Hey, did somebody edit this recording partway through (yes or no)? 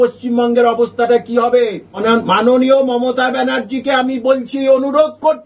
yes